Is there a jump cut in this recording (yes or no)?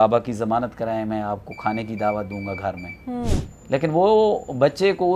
no